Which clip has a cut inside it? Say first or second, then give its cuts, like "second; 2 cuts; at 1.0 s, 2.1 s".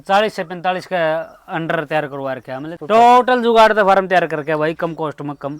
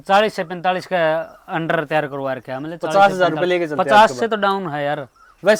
first; 1 cut; at 2.7 s